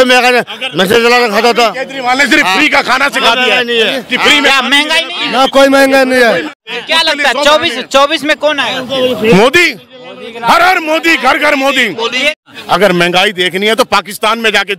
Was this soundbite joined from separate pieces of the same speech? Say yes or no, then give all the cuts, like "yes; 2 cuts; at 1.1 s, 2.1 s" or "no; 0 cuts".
yes; 2 cuts; at 6.7 s, 12.4 s